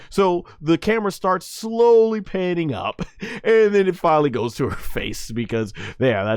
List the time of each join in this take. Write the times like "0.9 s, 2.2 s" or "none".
none